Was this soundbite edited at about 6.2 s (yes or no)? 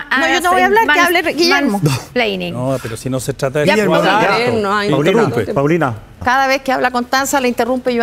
yes